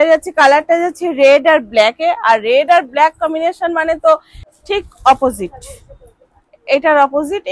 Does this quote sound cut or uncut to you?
cut